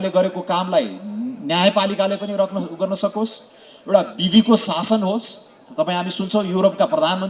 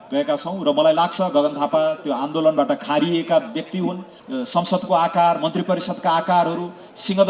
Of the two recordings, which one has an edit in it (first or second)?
second